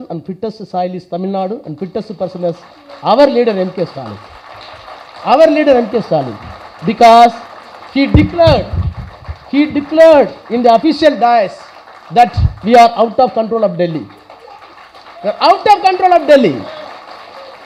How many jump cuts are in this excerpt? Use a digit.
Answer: 0